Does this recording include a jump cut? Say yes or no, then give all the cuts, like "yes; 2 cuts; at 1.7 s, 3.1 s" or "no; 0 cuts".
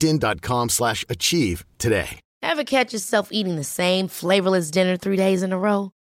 yes; 1 cut; at 2.2 s